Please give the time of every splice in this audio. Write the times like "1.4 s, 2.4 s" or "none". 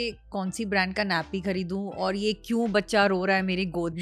none